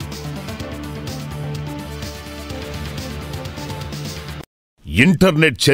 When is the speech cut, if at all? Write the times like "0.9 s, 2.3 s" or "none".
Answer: 4.8 s